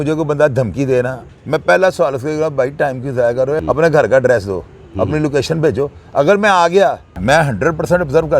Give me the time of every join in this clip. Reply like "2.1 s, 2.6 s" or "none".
1.2 s, 3.6 s, 7.1 s